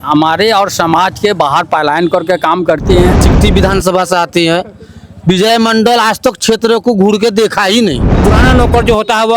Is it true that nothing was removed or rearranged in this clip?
no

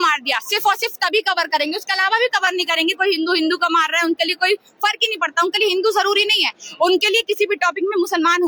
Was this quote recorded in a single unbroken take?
yes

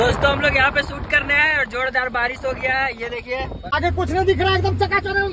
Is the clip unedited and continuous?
no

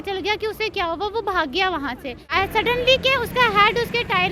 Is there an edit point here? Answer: yes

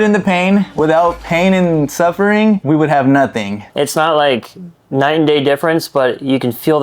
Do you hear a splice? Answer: yes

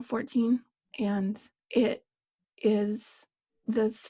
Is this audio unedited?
no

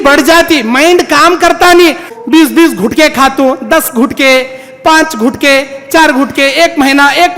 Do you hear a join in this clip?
yes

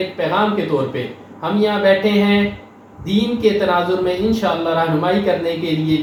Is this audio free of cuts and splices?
yes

